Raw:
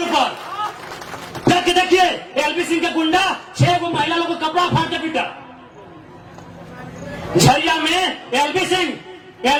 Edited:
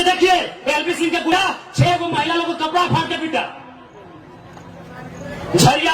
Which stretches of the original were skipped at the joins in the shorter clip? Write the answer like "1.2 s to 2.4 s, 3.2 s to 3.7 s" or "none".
3.0 s to 3.1 s

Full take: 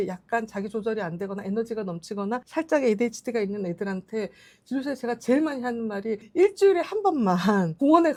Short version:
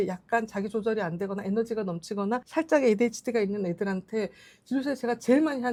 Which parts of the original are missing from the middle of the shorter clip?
none

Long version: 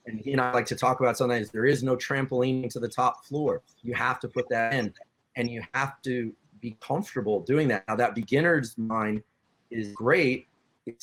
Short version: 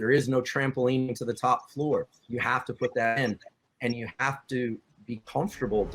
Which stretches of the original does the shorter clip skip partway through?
none

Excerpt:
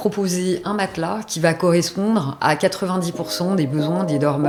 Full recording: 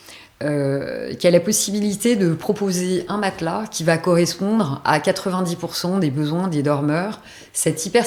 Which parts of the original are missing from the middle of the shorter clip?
none

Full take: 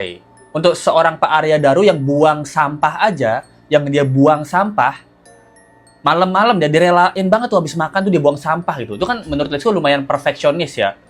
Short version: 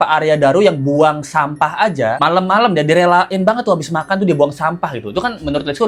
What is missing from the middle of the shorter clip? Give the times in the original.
3.4 s to 6.0 s

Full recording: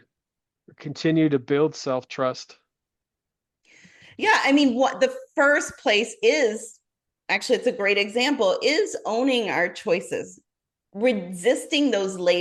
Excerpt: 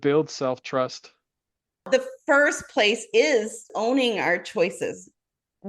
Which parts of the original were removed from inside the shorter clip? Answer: 3.3 s to 4.9 s, 6.8 s to 9.0 s

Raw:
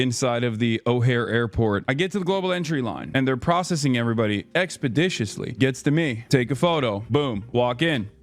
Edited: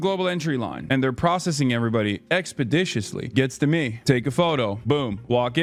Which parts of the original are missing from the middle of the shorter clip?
none

